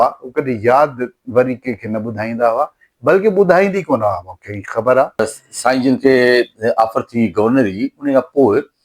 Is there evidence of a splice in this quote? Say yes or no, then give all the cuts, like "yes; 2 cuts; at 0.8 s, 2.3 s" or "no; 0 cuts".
yes; 1 cut; at 5.4 s